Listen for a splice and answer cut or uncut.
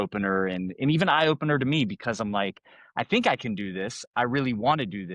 uncut